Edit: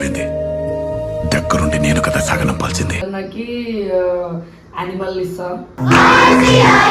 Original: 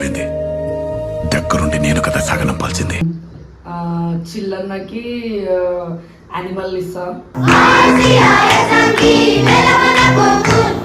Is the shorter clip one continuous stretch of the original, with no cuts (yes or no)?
no